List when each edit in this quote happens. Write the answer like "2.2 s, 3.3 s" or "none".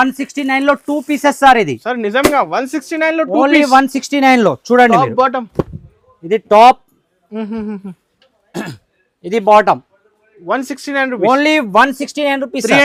none

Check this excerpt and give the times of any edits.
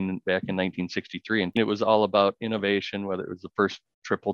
1.6 s

